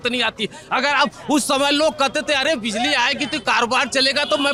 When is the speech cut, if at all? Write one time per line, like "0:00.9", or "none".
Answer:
none